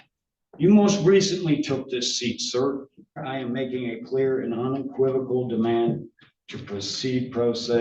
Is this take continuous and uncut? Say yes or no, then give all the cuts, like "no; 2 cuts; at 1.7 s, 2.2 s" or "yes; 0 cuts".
no; 1 cut; at 3.2 s